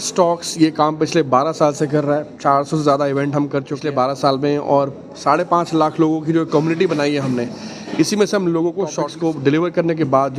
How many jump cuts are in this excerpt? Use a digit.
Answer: 2